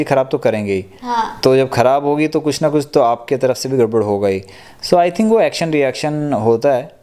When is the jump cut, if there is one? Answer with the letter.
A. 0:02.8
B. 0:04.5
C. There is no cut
C